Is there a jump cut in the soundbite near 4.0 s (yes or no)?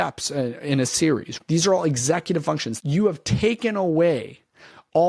no